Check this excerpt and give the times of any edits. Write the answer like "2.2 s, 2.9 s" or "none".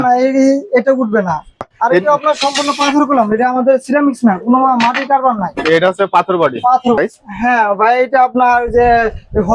1.6 s, 7.0 s